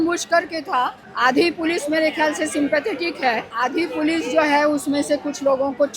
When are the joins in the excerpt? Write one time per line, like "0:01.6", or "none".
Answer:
0:01.0
0:03.5